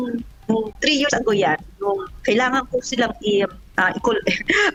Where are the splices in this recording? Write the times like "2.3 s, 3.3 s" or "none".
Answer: none